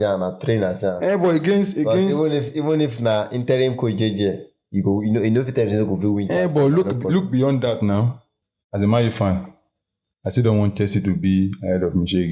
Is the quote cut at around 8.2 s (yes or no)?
yes